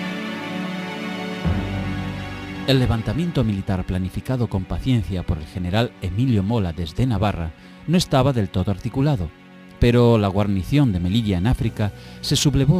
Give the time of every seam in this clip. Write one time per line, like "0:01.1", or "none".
0:04.1